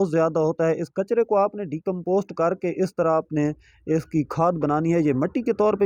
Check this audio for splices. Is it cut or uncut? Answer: uncut